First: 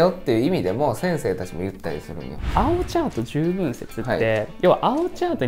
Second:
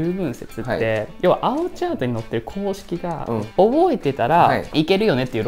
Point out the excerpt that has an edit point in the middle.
first; 1 cut; at 2.5 s

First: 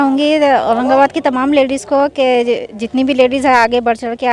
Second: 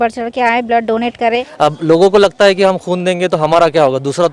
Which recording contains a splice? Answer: second; 1 cut; at 1.5 s

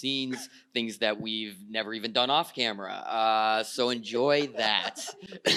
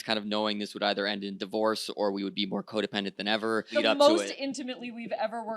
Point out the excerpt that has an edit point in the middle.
second; 1 cut; at 3.7 s

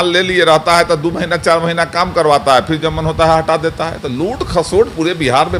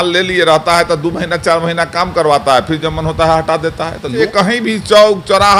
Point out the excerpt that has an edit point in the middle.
second; 1 cut; at 4.2 s

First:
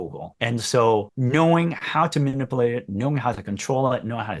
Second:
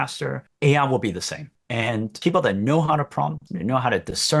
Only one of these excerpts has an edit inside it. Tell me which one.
second; 1 cut; at 3.4 s

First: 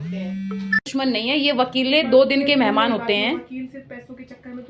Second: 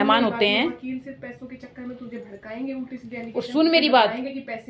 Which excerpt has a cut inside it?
first; 1 cut; at 1.3 s

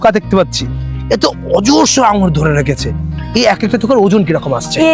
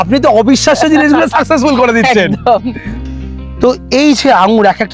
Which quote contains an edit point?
second; 1 cut; at 2.9 s

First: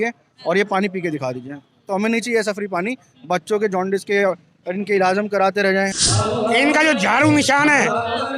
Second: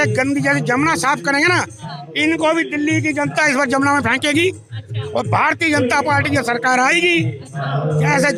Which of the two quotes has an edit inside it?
first; 1 cut; at 6.0 s

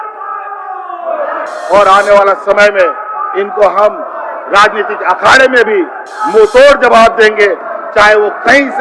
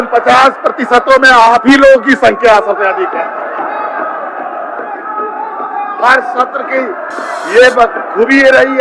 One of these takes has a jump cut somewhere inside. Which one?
first; 1 cut; at 1.5 s

